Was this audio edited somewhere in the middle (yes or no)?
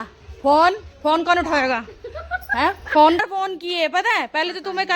yes